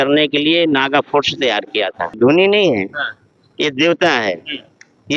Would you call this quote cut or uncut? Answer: cut